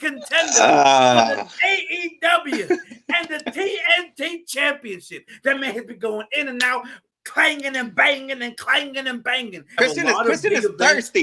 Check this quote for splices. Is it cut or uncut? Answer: cut